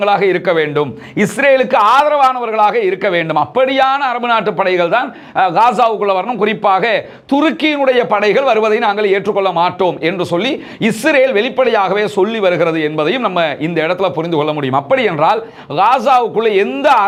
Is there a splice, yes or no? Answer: no